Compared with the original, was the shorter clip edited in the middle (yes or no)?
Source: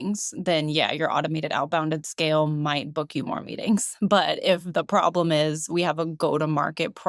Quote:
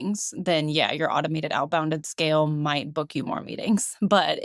no